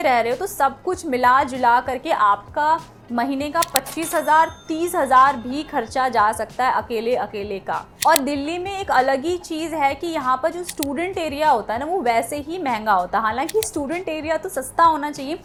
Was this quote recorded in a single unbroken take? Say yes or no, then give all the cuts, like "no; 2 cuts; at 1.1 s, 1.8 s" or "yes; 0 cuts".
yes; 0 cuts